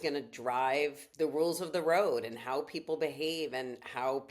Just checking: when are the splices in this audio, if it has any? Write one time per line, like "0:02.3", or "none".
0:01.0